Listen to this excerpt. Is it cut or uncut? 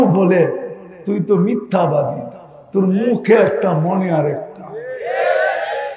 uncut